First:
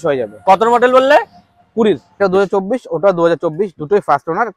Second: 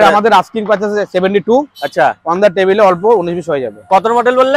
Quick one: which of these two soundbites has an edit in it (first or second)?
first